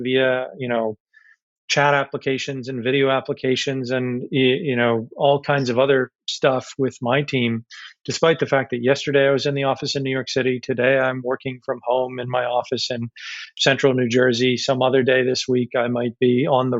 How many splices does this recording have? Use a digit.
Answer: 0